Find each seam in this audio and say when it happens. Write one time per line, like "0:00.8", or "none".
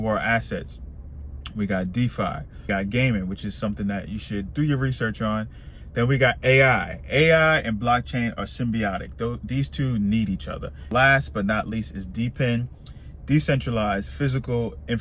0:02.7
0:10.9